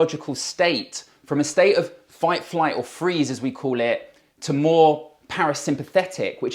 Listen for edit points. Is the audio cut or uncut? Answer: uncut